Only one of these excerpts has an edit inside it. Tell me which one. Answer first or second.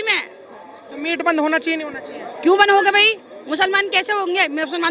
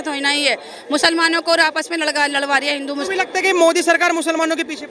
second